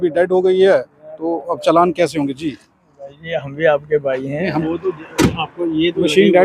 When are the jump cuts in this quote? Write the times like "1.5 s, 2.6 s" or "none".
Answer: 4.6 s